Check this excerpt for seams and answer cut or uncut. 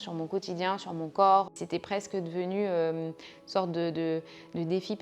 cut